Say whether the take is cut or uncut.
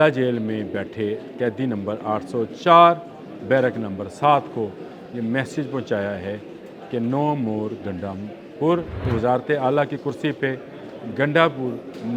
cut